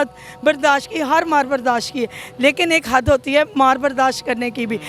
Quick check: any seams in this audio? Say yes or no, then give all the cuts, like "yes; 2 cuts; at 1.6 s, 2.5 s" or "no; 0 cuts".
no; 0 cuts